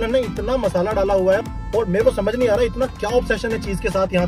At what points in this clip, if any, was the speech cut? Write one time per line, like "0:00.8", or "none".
0:01.5